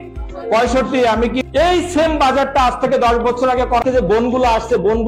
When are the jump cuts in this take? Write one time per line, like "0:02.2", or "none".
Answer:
0:01.4
0:03.8